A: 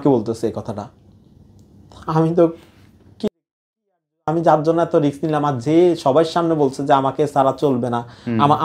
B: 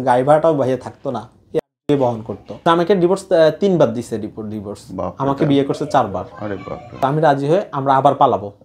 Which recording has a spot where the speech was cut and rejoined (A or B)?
B